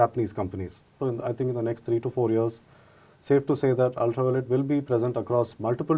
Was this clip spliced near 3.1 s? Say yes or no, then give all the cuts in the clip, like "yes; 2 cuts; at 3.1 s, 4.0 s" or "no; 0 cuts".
no; 1 cut; at 0.9 s